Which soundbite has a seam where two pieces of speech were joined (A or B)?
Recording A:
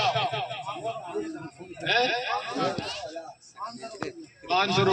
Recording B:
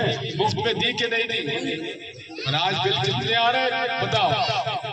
B